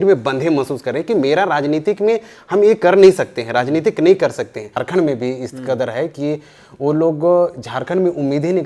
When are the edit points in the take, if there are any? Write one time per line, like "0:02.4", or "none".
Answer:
0:04.8